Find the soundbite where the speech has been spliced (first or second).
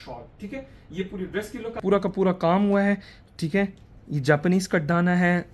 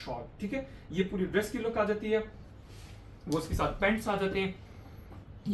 first